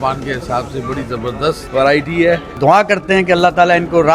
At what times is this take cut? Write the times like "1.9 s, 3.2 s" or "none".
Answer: 1.6 s, 2.5 s

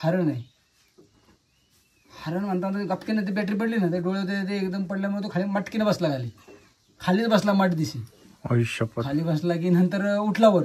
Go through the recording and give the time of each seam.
none

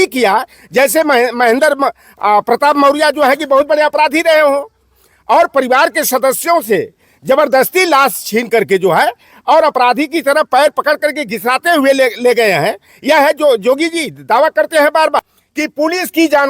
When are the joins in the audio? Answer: 15.4 s

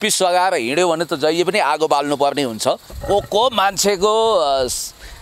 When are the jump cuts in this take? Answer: 2.9 s

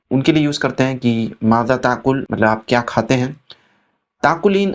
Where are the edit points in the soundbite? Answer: none

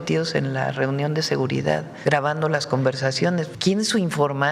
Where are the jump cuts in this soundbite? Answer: 1.9 s, 3.6 s

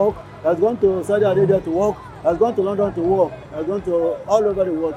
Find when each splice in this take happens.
none

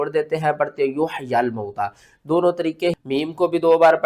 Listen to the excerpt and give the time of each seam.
3.0 s

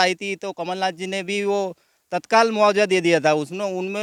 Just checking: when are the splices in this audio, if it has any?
none

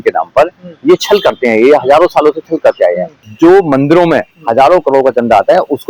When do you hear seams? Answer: 3.2 s

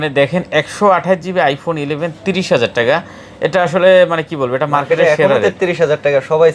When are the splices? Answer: none

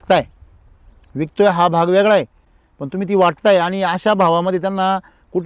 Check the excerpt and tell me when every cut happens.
none

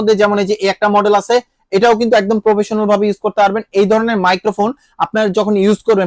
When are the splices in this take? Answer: none

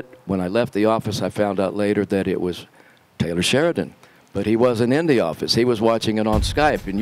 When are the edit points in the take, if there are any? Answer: none

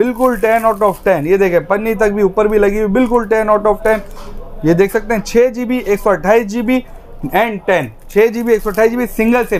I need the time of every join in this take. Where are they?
none

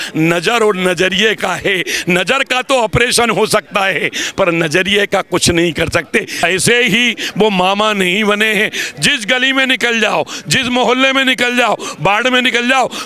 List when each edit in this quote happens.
6.3 s

